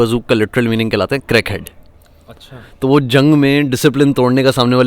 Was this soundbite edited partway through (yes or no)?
no